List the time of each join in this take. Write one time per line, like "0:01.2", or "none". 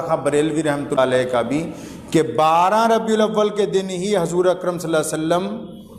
0:01.0